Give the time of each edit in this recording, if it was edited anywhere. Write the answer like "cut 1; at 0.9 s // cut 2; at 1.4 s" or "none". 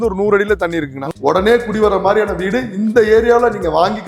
cut 1; at 1.0 s